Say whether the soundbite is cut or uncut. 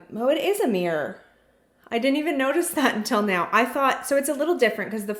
uncut